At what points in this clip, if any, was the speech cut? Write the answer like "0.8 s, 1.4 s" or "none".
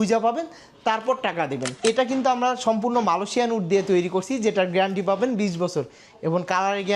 1.7 s